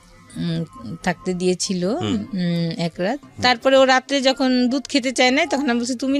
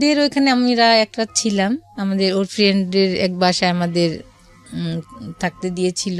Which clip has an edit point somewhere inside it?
first; 1 cut; at 3.3 s

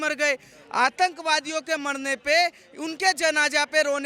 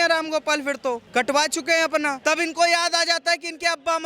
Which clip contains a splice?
second; 2 cuts; at 1.0 s, 2.2 s

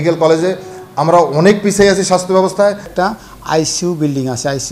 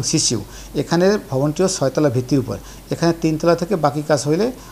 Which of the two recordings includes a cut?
first; 1 cut; at 2.9 s

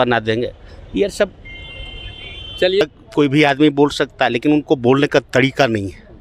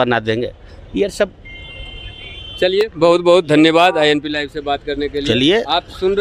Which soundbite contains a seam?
first; 1 cut; at 2.8 s

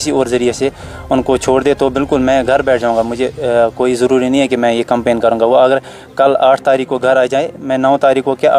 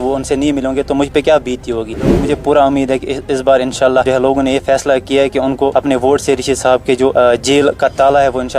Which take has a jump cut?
second; 4 cuts; at 2.2 s, 4.1 s, 5.7 s, 7.1 s

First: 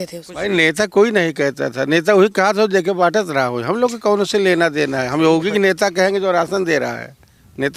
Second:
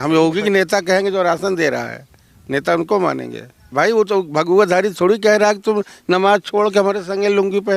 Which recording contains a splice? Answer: second; 1 cut; at 3.7 s

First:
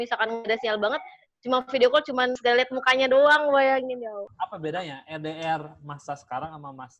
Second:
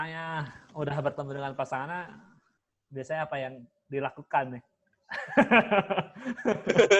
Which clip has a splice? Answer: first; 2 cuts; at 2.4 s, 4.3 s

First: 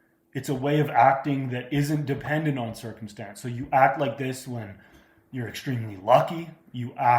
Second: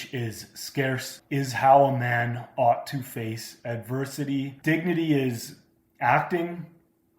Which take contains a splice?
second; 2 cuts; at 1.1 s, 4.5 s

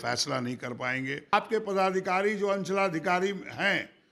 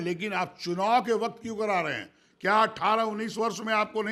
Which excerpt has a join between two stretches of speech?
first; 1 cut; at 1.3 s

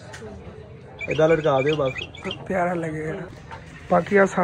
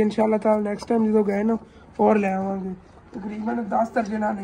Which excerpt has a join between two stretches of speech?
first; 1 cut; at 3.3 s

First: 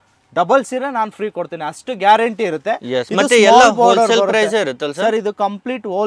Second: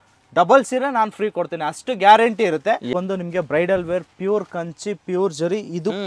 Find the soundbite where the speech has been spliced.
second; 1 cut; at 2.9 s

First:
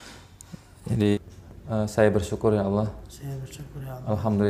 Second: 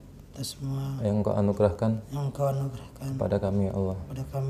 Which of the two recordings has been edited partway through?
first; 1 cut; at 1.1 s

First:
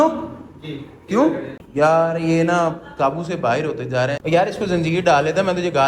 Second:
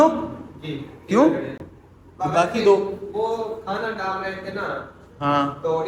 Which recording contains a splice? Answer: first; 2 cuts; at 1.6 s, 4.2 s

